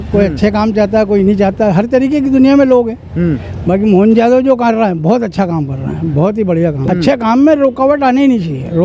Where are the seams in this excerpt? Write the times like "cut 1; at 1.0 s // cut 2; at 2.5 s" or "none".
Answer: cut 1; at 6.8 s